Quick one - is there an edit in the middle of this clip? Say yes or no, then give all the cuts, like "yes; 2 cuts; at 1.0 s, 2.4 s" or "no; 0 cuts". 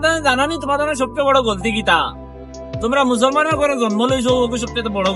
no; 0 cuts